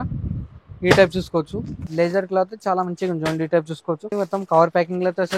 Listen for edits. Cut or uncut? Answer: cut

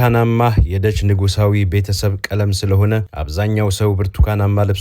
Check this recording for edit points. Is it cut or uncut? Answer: uncut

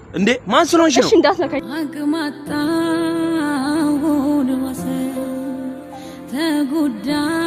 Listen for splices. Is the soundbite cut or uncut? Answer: cut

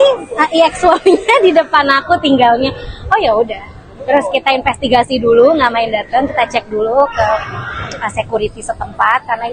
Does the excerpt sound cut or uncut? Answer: uncut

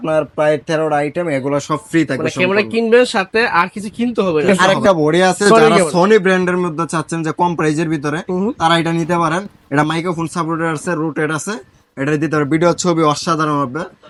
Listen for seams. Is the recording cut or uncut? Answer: uncut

